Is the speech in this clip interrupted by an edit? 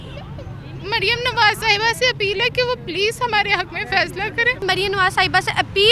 yes; 1 cut; at 4.6 s

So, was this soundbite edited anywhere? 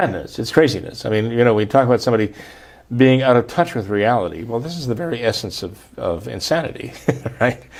no; 0 cuts

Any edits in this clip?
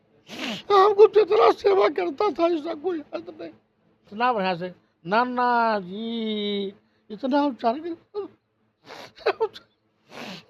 yes; 1 cut; at 4.1 s

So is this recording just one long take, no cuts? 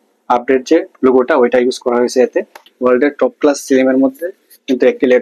no; 1 cut; at 2.6 s

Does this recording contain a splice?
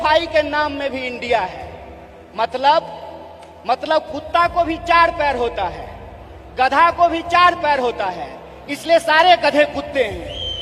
no; 0 cuts

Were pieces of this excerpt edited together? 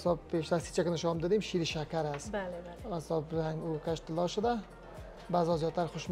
no; 0 cuts

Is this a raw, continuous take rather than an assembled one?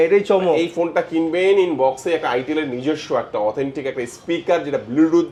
yes; 0 cuts

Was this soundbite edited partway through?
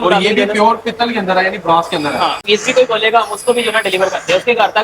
yes; 1 cut; at 2.4 s

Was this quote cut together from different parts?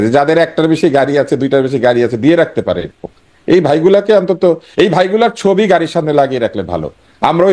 no; 0 cuts

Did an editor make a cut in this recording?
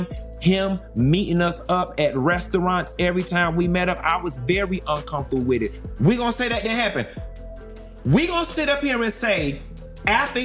yes; 1 cut; at 5.8 s

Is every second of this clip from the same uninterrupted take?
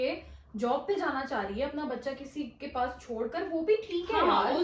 yes; 0 cuts

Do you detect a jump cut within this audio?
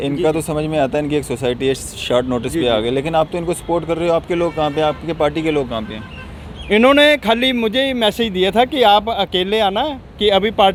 no; 0 cuts

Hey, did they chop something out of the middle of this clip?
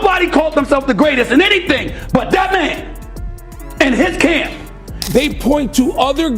yes; 1 cut; at 5.0 s

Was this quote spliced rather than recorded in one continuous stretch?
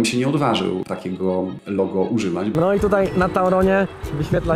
yes; 1 cut; at 2.5 s

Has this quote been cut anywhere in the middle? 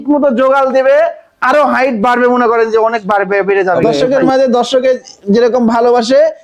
yes; 1 cut; at 3.9 s

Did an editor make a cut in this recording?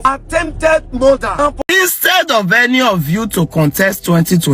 yes; 1 cut; at 1.5 s

